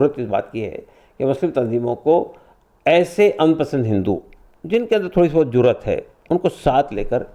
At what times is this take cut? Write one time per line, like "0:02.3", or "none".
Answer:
none